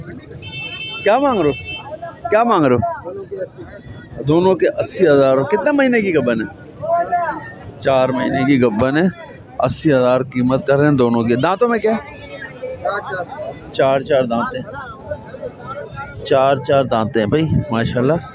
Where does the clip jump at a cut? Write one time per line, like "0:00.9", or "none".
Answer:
none